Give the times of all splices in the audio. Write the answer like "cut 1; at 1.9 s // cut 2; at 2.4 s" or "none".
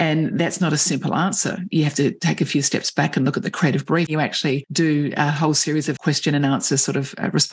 cut 1; at 4.1 s // cut 2; at 6.0 s